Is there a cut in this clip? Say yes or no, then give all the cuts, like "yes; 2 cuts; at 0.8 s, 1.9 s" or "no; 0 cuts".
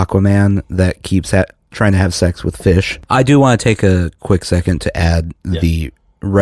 yes; 1 cut; at 3.0 s